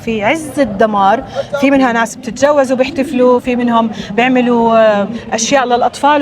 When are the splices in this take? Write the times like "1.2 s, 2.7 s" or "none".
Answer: none